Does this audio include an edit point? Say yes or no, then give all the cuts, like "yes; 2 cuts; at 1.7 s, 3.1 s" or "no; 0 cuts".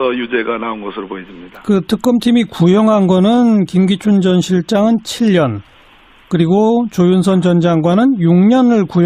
yes; 1 cut; at 7.4 s